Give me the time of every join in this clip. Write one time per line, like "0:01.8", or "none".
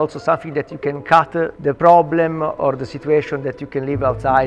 none